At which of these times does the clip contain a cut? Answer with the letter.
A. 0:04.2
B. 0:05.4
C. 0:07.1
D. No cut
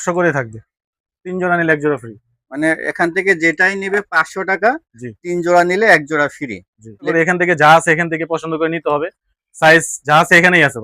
C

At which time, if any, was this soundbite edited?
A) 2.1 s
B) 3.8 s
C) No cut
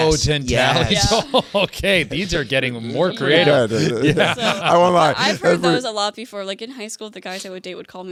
C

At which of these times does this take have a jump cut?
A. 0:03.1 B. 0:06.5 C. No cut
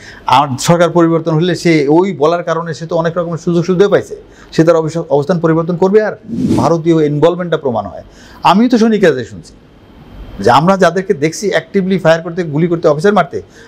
B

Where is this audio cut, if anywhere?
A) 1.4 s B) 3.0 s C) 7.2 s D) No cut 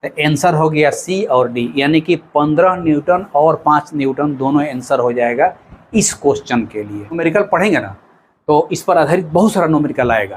C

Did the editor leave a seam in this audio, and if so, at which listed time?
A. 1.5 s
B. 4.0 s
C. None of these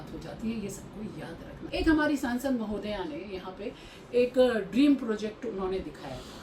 A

